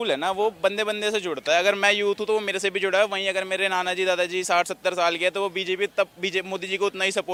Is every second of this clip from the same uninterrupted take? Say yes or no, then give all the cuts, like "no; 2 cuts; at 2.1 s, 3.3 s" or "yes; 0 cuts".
yes; 0 cuts